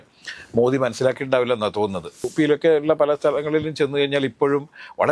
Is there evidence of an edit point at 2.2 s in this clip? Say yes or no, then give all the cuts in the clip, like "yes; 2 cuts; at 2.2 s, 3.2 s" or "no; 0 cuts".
yes; 1 cut; at 2.2 s